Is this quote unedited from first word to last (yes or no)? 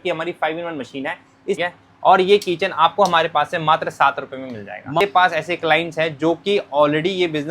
no